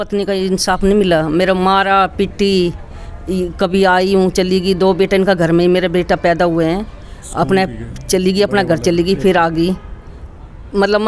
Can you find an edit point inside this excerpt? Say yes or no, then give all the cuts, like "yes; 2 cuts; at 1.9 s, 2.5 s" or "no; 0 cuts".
no; 0 cuts